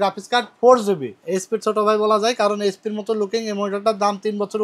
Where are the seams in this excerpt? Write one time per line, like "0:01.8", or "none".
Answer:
0:01.2